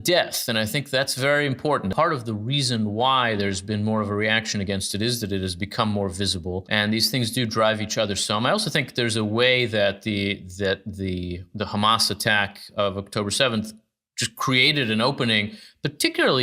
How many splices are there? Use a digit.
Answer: 2